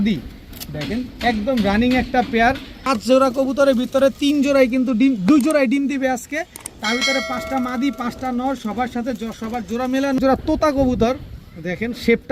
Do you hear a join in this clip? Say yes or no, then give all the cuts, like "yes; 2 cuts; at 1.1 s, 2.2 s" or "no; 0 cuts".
yes; 2 cuts; at 2.8 s, 10.2 s